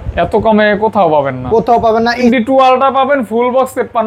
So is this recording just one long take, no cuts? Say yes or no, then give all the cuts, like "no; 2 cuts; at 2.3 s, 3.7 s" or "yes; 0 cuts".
no; 1 cut; at 2.2 s